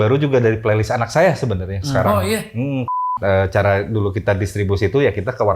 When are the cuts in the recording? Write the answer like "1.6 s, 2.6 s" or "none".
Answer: 3.0 s